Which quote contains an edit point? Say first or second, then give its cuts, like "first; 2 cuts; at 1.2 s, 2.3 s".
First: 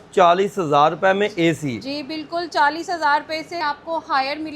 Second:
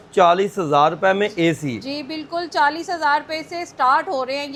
first; 1 cut; at 3.6 s